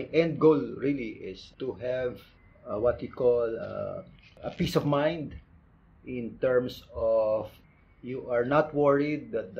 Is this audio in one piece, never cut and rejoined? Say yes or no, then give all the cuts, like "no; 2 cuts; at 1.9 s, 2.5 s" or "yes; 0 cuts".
yes; 0 cuts